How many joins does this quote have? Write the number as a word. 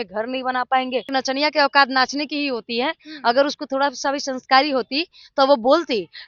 one